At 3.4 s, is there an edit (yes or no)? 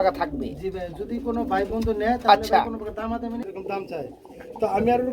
yes